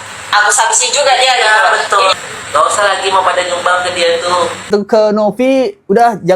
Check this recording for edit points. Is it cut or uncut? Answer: cut